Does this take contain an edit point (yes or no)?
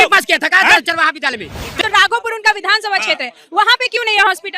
yes